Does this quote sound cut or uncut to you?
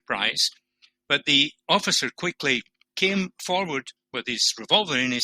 cut